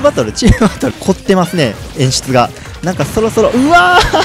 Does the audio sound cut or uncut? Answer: cut